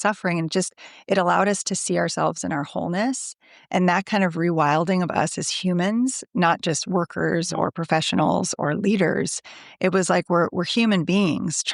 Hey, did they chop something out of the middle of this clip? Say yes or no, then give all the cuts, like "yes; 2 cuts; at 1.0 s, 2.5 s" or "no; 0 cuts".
no; 0 cuts